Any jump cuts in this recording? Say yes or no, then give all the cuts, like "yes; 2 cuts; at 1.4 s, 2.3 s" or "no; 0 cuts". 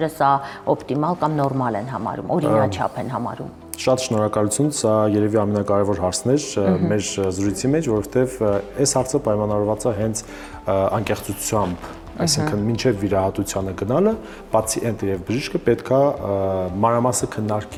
no; 0 cuts